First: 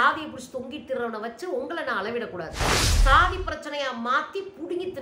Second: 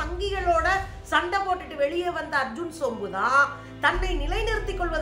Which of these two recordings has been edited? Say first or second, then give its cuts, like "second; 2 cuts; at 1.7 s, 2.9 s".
first; 1 cut; at 2.9 s